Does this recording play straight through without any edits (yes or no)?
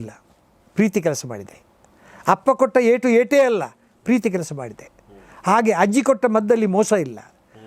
yes